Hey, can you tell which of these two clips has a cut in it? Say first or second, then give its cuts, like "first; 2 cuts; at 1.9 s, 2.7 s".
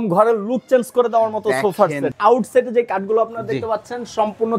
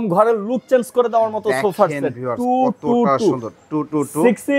first; 1 cut; at 2.1 s